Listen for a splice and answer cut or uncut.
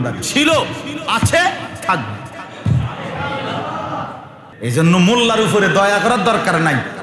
cut